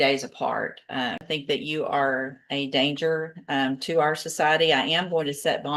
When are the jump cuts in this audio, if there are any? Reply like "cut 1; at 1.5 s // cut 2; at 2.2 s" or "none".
cut 1; at 1.2 s